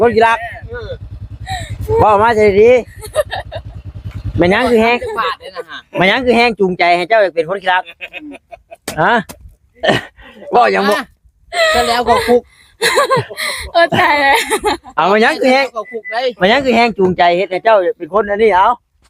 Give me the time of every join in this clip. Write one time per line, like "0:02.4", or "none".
none